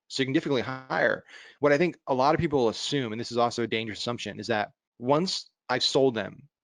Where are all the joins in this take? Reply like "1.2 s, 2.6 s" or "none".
4.9 s